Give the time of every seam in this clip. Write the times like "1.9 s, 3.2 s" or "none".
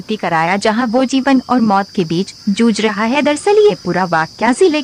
none